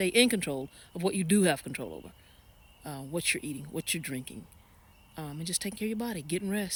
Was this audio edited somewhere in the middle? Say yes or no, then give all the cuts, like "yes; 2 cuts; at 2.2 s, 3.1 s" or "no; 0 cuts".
no; 0 cuts